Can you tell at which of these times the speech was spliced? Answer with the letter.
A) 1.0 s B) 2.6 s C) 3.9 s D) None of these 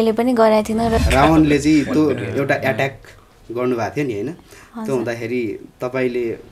A